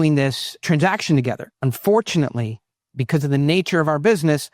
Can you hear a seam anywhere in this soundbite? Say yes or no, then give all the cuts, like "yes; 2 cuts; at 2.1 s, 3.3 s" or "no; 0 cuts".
yes; 1 cut; at 1.5 s